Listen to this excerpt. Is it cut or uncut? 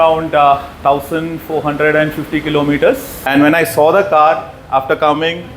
cut